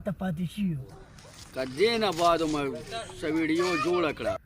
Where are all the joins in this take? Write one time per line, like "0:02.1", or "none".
0:01.0